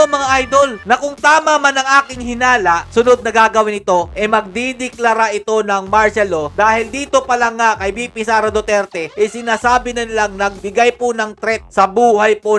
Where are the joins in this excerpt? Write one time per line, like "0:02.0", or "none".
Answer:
none